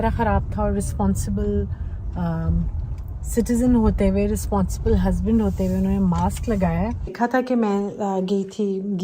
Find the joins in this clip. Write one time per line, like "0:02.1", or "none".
0:07.1